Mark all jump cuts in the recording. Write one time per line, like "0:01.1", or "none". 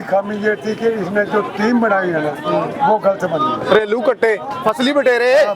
0:04.5